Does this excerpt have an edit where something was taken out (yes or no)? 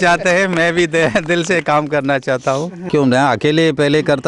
yes